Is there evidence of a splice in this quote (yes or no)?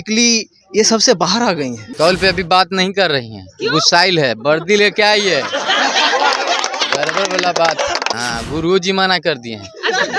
yes